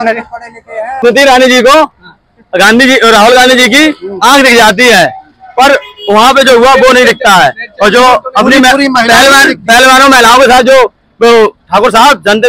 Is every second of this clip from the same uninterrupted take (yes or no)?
no